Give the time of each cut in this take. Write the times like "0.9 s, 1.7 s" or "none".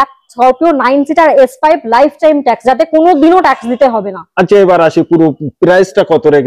none